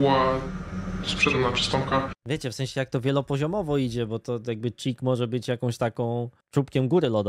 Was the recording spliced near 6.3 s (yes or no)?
yes